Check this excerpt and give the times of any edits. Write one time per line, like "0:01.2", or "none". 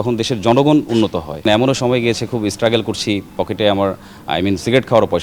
0:01.4